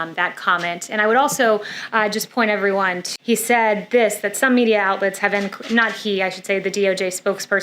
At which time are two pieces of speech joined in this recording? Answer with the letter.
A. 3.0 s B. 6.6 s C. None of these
A